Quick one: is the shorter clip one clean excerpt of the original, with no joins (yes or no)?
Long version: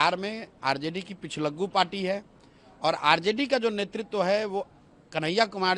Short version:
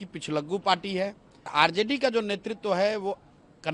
no